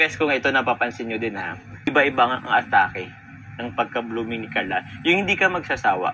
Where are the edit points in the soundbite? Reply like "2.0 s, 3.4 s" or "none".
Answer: 1.9 s